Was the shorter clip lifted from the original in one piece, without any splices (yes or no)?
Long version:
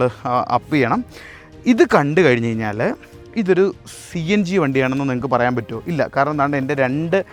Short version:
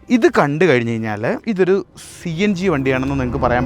no